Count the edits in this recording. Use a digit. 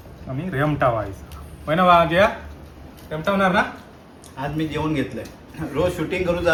0